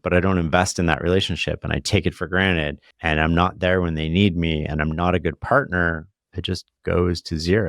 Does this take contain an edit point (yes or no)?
yes